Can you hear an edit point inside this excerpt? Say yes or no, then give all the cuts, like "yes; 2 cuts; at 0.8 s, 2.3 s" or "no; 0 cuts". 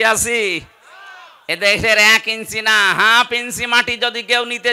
no; 0 cuts